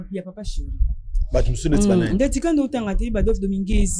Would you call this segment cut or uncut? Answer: uncut